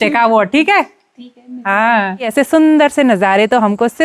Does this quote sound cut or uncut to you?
cut